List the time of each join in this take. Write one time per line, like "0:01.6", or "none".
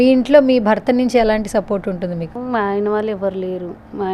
0:02.3